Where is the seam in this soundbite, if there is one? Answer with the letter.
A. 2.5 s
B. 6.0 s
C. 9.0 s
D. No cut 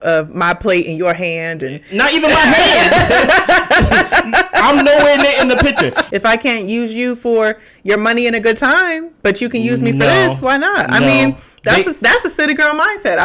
B